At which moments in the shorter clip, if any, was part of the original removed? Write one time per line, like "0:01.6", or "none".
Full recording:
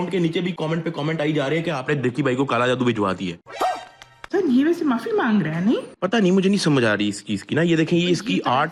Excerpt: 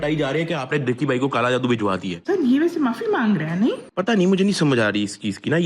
0:02.1